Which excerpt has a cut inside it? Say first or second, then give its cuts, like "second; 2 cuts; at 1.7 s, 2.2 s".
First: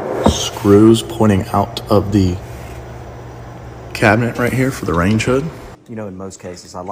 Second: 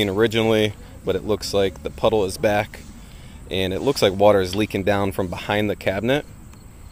first; 1 cut; at 5.7 s